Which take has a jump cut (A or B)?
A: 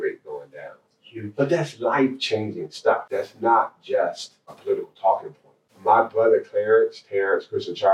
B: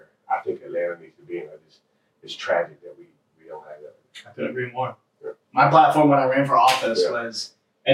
A